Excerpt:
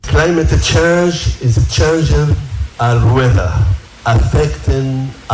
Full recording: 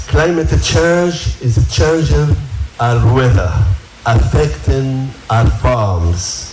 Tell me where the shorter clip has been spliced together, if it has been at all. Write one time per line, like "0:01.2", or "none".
none